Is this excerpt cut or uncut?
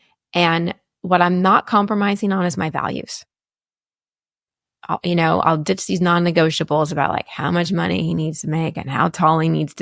uncut